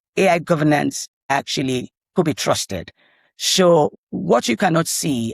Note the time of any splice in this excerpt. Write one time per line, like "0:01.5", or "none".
0:01.2
0:03.9